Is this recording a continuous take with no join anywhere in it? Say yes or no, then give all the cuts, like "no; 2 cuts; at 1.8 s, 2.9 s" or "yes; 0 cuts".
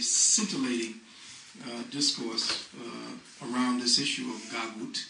no; 1 cut; at 1.8 s